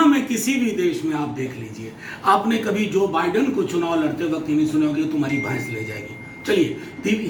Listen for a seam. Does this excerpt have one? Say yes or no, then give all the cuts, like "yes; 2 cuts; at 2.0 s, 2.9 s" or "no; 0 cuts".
no; 0 cuts